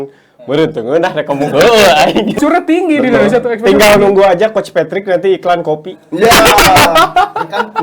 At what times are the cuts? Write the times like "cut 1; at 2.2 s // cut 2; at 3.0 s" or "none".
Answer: cut 1; at 2.4 s